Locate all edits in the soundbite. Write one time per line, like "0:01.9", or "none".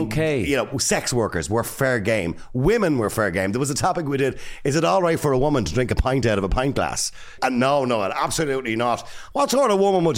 0:07.3